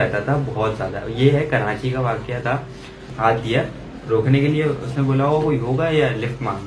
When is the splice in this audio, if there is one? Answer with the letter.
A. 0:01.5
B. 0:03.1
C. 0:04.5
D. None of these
B